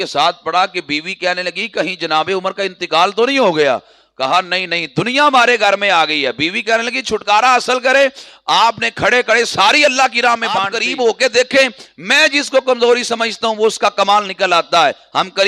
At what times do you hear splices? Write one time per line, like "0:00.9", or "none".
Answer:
0:10.7